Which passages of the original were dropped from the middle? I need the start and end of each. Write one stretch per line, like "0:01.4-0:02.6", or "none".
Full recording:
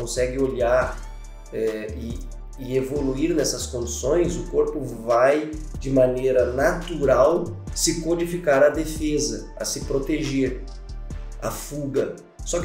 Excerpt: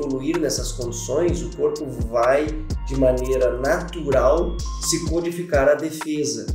none